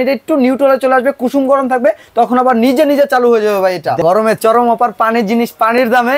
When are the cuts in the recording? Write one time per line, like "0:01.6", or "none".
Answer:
0:04.0